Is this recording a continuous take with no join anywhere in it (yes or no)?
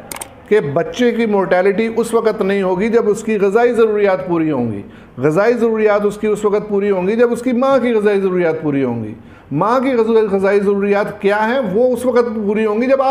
yes